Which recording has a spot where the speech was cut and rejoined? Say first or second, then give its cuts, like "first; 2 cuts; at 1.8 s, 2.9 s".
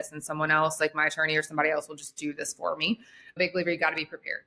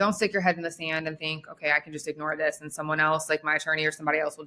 first; 1 cut; at 3.4 s